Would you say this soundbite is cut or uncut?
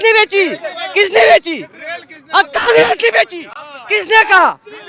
uncut